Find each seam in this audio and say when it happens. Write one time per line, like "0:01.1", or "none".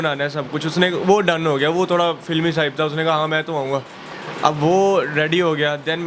none